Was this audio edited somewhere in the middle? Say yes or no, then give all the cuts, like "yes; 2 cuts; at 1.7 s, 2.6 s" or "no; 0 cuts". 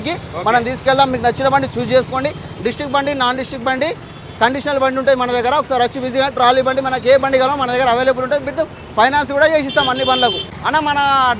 no; 0 cuts